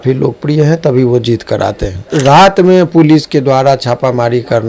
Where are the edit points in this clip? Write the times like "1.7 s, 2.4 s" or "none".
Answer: 2.1 s

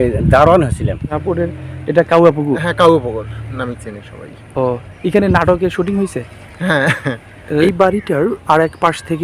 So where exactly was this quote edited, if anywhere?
1.2 s, 7.6 s

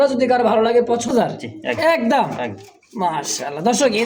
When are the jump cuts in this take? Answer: 1.2 s

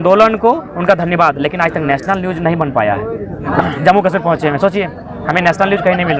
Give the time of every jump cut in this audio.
3.4 s

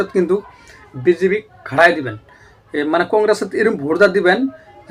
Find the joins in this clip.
none

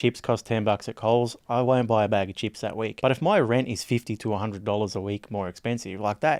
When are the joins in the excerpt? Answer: 2.9 s

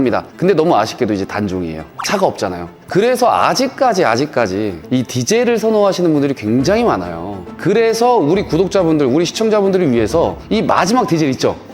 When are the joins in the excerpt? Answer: 2.8 s

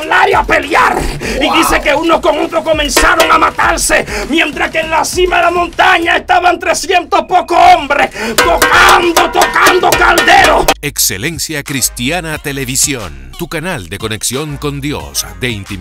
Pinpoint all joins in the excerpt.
10.8 s

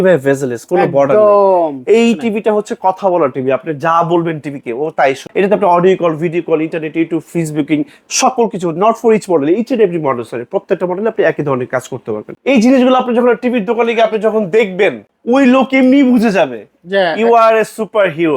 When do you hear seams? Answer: 5.2 s, 12.3 s, 15.1 s

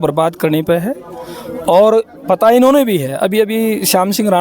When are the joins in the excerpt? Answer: none

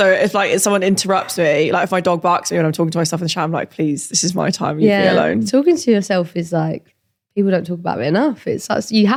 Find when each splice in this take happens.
none

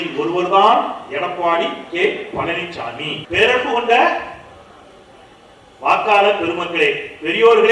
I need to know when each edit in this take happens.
3.2 s

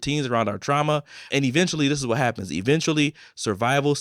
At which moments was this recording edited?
1.3 s

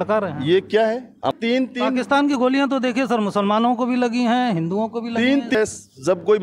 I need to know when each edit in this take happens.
1.3 s, 5.5 s

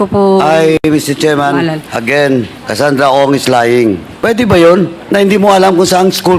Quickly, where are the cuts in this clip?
2.6 s, 4.1 s, 5.0 s

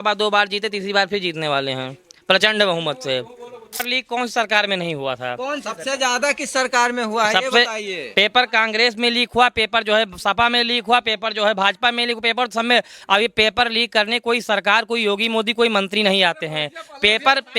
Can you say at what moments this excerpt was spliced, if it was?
3.7 s

